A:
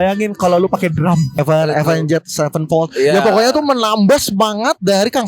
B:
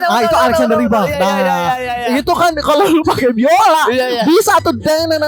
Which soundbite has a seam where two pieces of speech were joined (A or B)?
A